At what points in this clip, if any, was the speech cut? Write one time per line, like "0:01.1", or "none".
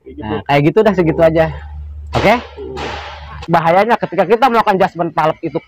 0:03.4